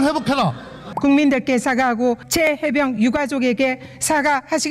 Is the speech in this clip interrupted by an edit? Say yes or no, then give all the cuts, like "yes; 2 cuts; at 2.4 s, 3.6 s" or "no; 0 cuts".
yes; 2 cuts; at 0.9 s, 2.2 s